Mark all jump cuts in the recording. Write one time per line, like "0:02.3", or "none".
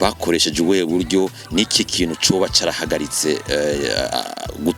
none